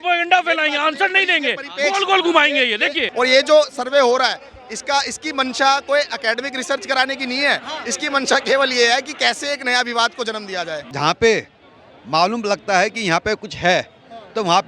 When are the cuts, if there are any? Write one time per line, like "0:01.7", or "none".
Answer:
0:03.0
0:10.8